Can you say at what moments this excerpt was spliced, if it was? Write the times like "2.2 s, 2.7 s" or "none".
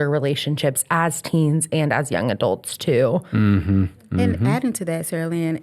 4.0 s